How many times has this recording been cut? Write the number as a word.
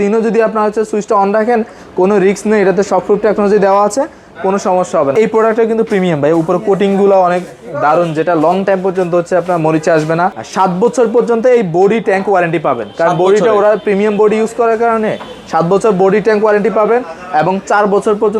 two